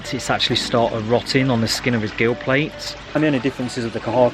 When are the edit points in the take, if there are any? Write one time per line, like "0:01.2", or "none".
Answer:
0:03.1